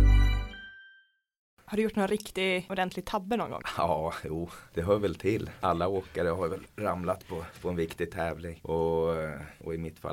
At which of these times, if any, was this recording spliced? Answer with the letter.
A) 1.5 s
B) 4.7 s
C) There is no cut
A